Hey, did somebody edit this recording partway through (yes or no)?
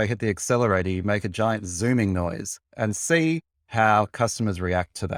no